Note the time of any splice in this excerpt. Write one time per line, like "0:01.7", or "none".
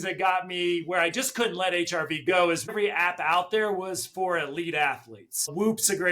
0:02.7